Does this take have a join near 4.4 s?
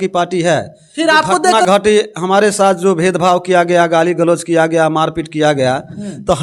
no; 1 cut; at 1.6 s

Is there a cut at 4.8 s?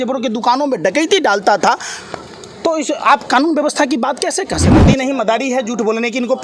yes; 1 cut; at 4.8 s

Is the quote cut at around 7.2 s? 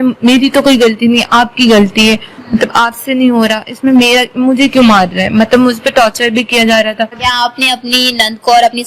yes; 1 cut; at 7.2 s

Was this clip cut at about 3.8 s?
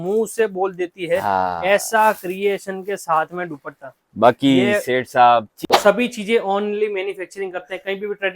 no; 1 cut; at 5.6 s

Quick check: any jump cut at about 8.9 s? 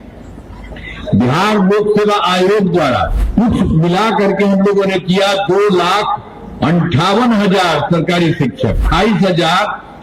yes; 2 cuts; at 3.2 s, 8.9 s

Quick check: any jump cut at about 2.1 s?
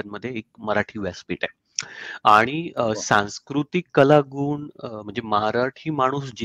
no; 0 cuts

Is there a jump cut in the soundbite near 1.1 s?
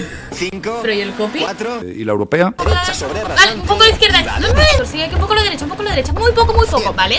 no; 2 cuts; at 2.6 s, 4.8 s

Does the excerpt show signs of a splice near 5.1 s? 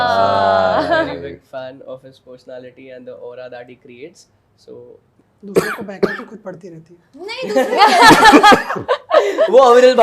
yes; 1 cut; at 5.1 s

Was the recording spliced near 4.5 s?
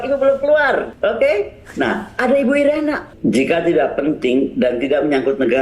no; 2 cuts; at 0.9 s, 3.1 s

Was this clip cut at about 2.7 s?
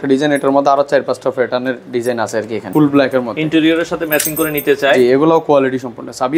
yes; 1 cut; at 2.7 s

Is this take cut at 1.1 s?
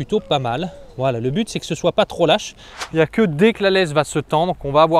no; 1 cut; at 2.8 s

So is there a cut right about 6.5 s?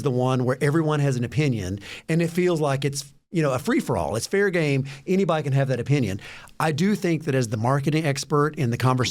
no; 0 cuts

